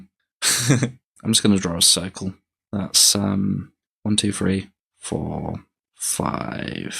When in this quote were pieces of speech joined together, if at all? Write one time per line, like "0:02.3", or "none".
0:01.1